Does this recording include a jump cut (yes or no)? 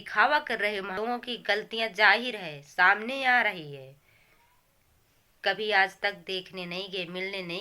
yes